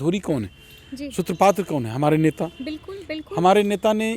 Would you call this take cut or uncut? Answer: uncut